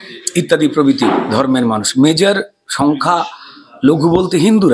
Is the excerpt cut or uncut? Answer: uncut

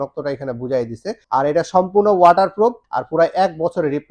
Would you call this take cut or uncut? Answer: cut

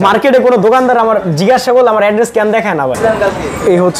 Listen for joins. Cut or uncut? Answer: cut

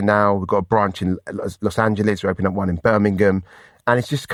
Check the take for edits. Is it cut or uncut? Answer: uncut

